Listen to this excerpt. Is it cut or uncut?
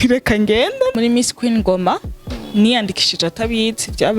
cut